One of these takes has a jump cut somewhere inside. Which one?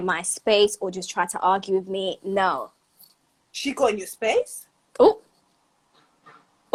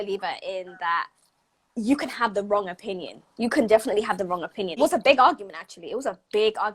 second; 1 cut; at 4.8 s

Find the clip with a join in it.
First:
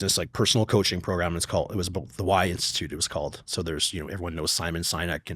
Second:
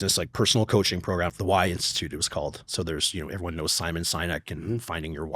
second; 1 cut; at 1.3 s

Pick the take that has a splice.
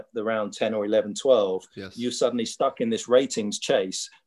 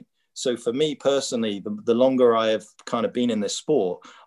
second; 1 cut; at 2.8 s

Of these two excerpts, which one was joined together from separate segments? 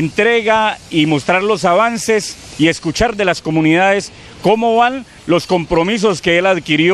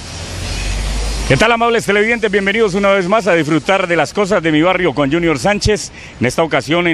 first; 1 cut; at 3.3 s

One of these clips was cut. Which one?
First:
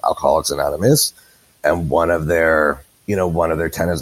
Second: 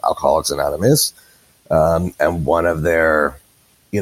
first; 2 cuts; at 1.5 s, 2.9 s

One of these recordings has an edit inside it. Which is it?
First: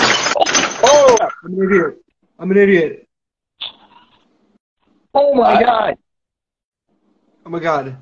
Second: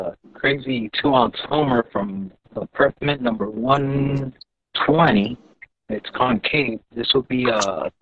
first; 1 cut; at 1.2 s

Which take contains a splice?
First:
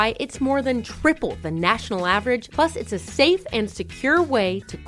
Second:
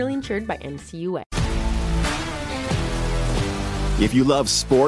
second; 1 cut; at 1.3 s

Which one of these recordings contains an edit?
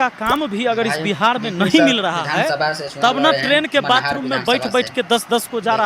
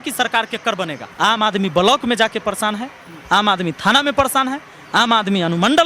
second; 1 cut; at 1.0 s

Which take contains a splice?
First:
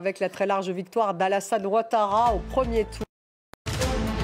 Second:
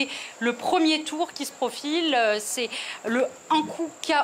first; 1 cut; at 3.0 s

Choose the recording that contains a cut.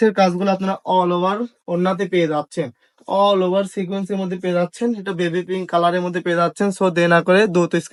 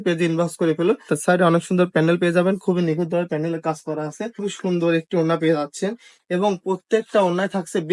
second; 2 cuts; at 1.1 s, 4.4 s

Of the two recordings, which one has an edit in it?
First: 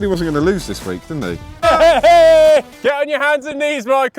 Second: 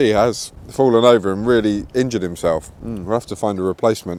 first; 1 cut; at 2.7 s

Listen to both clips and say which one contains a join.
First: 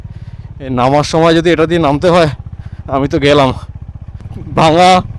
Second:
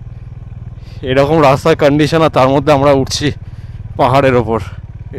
first; 1 cut; at 4.0 s

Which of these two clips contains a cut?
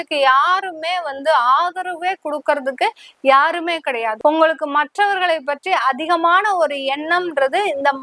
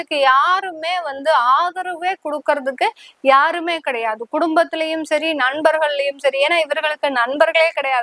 first; 1 cut; at 4.1 s

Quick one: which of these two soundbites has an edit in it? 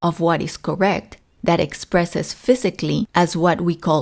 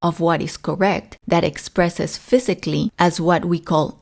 second; 1 cut; at 1.1 s

